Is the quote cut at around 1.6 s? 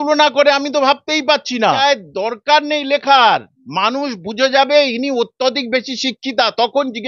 yes; 1 cut; at 1.6 s

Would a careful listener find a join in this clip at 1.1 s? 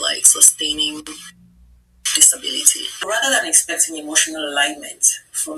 no; 1 cut; at 3.0 s

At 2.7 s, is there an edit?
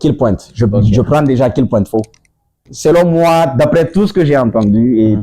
yes; 1 cut; at 2.7 s

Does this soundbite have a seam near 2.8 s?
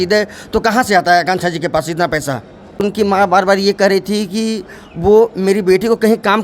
yes; 1 cut; at 2.8 s

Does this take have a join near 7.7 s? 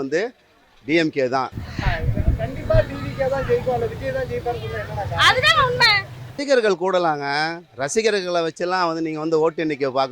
no; 2 cuts; at 1.7 s, 6.3 s

